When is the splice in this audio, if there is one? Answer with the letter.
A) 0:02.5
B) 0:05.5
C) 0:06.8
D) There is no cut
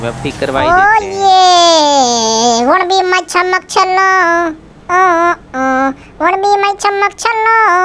D